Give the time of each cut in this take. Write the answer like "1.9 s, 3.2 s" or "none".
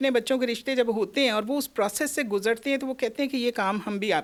none